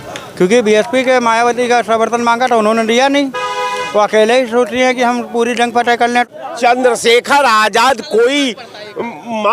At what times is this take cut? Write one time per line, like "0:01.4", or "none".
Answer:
0:06.2